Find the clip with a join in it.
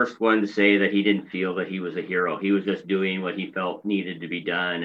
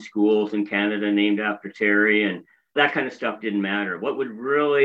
second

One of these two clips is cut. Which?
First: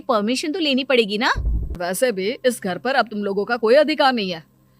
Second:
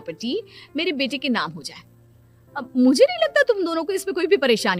first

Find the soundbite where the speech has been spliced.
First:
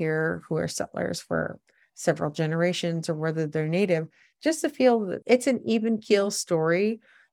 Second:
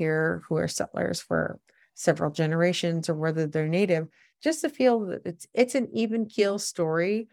first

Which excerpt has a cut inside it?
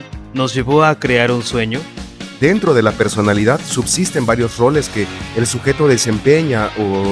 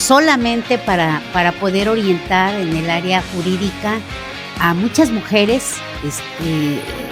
first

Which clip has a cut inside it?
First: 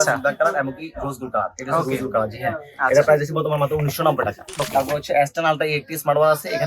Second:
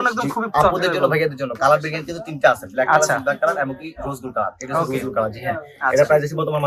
first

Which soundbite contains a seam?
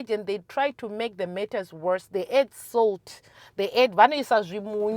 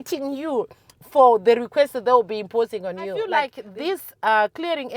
second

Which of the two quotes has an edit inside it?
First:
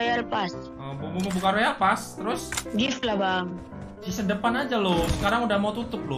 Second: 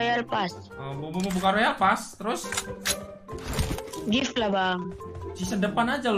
first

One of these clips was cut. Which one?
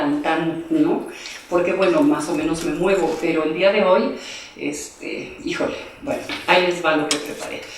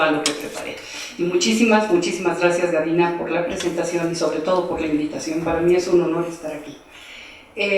first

